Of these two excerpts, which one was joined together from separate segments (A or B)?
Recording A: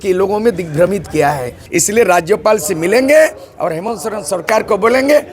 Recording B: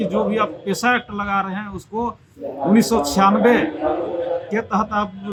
A